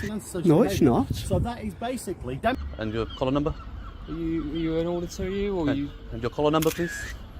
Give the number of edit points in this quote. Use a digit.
1